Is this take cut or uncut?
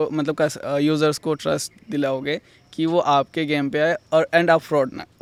uncut